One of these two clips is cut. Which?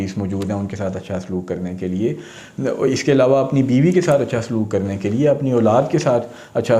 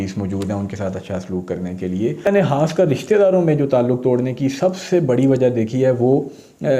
second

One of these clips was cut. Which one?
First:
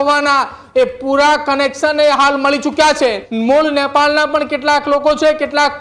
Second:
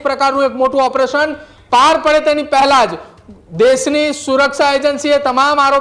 first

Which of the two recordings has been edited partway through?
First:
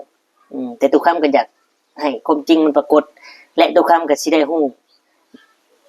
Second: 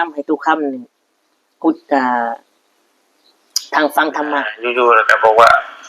second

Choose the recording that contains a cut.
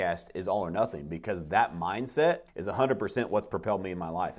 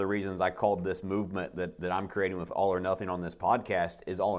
first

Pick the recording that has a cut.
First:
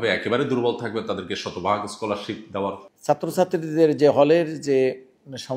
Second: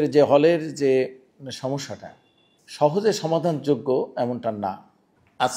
first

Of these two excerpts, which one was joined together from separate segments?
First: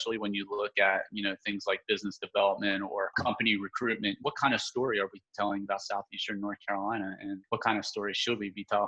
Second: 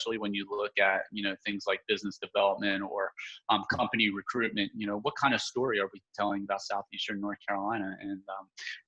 first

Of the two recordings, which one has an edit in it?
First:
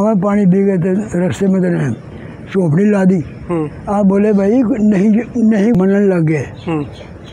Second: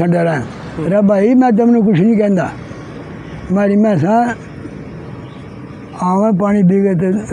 first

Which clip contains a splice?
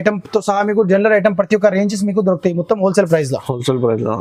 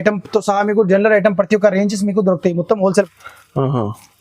second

